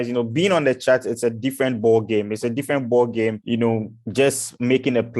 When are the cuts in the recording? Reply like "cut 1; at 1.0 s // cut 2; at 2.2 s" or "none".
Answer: cut 1; at 3.4 s